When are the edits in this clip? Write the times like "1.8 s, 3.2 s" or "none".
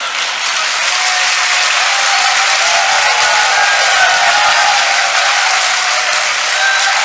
none